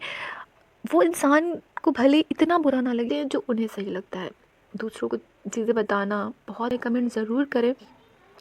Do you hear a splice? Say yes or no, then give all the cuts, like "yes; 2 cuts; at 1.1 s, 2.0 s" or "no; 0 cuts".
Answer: yes; 2 cuts; at 3.1 s, 6.7 s